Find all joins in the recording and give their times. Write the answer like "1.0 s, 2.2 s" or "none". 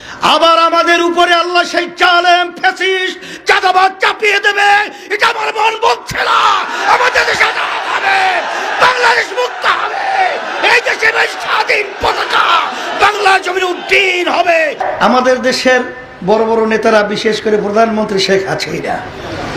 14.8 s